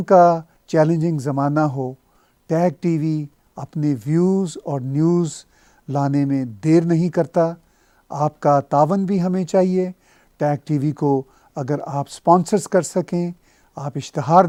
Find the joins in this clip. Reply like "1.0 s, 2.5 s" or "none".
none